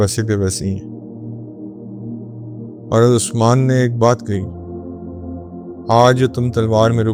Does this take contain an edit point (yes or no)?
no